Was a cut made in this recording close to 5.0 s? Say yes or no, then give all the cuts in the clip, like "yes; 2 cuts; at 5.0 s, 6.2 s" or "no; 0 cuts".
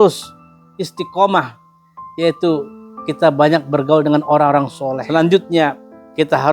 yes; 1 cut; at 5.0 s